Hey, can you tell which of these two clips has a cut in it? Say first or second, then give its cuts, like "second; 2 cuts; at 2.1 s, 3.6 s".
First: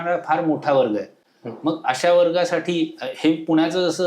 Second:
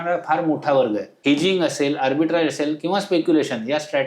second; 1 cut; at 1.1 s